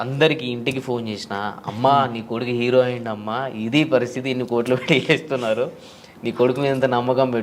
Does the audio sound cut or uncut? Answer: uncut